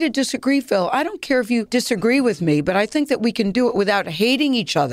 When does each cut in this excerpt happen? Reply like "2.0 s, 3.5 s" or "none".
1.7 s